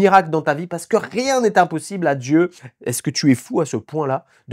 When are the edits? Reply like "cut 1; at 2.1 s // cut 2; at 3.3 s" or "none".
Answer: cut 1; at 2.6 s